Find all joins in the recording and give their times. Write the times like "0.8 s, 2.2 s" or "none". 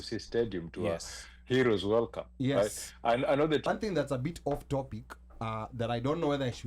3.7 s